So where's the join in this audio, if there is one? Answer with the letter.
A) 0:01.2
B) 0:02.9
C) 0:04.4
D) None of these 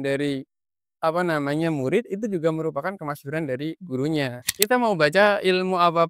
C